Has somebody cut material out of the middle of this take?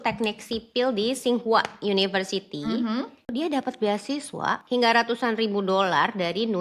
yes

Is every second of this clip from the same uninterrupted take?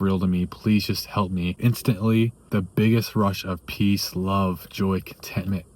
no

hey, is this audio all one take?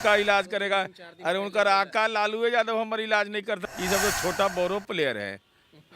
no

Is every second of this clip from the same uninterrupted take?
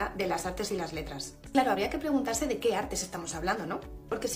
no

